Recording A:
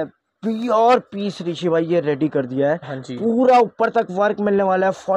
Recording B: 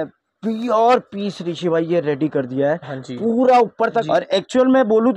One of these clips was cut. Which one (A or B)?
B